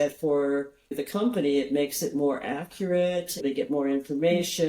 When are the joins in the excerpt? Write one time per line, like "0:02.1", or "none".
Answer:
0:01.0
0:03.4